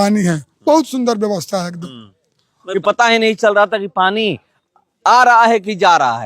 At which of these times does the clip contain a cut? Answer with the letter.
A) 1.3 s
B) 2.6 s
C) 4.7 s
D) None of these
B